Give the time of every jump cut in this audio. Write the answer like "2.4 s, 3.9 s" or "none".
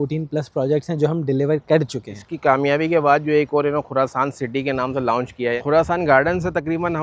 2.3 s, 5.6 s